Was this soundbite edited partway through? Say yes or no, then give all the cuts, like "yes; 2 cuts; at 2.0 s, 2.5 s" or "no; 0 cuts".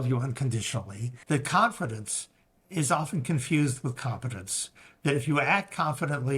yes; 1 cut; at 1.1 s